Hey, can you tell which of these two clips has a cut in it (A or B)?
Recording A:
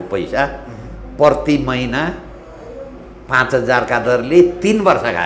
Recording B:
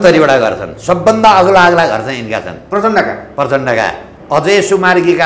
B